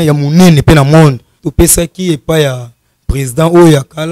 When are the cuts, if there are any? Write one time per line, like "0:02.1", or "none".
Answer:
0:01.4